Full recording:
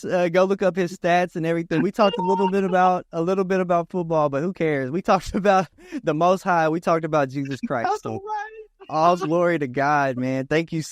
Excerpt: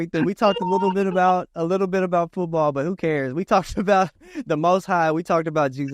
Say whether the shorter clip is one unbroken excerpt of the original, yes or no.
yes